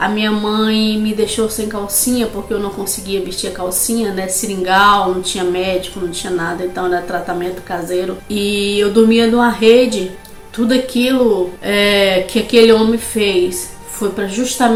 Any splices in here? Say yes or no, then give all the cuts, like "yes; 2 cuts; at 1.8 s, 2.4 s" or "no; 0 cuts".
no; 0 cuts